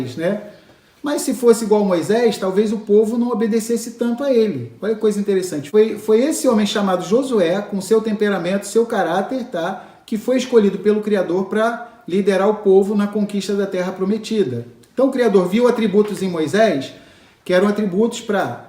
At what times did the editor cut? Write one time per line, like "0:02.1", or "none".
0:05.6